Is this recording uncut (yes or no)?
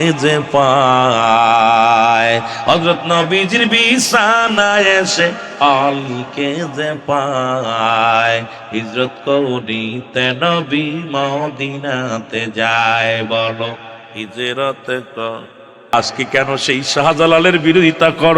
no